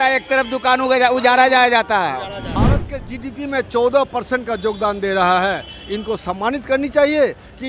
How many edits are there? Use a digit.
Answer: 1